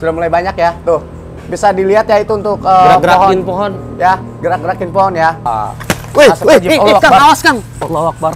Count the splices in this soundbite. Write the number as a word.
one